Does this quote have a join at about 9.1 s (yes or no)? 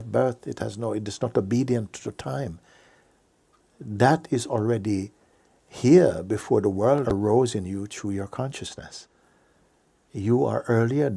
no